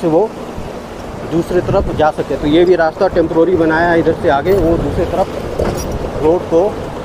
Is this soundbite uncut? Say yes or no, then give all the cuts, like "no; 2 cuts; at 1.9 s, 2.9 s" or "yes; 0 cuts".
yes; 0 cuts